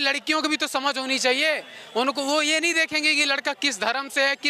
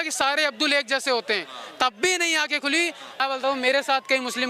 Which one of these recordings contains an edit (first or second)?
second